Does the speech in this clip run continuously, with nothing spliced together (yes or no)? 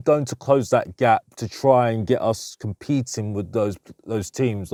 yes